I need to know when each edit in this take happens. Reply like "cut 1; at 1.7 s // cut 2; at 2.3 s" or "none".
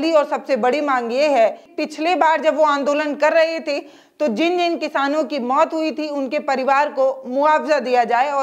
cut 1; at 1.7 s